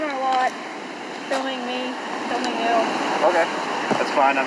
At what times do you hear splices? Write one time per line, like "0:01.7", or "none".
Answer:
none